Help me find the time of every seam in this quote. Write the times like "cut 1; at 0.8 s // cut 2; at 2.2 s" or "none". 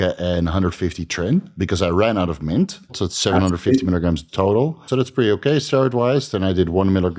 cut 1; at 3.1 s // cut 2; at 4.8 s